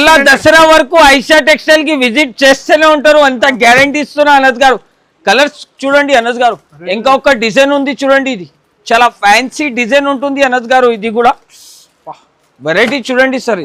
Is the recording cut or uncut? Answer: uncut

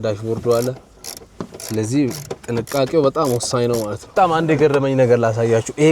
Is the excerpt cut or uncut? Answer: cut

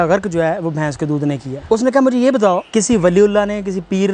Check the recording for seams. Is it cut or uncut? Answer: cut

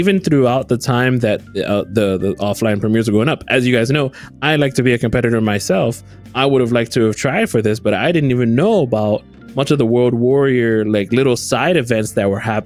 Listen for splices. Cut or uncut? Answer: uncut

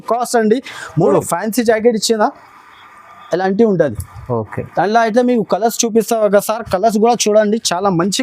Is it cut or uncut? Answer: cut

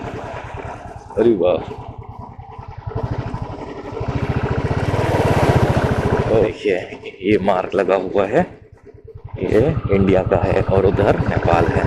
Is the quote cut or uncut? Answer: cut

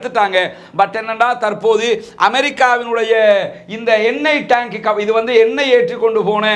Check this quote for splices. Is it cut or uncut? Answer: uncut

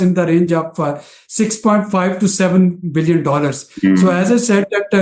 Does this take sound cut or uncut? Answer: uncut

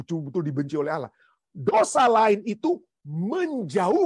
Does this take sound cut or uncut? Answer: uncut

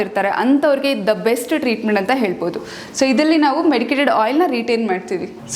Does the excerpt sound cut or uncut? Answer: uncut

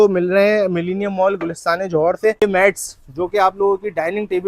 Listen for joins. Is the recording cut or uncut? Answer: cut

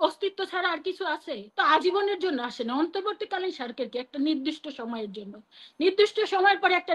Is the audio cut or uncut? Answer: cut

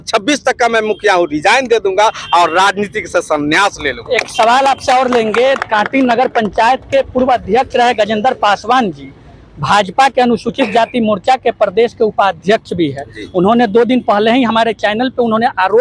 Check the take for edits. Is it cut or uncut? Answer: uncut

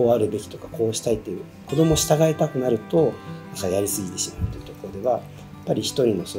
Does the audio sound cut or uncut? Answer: uncut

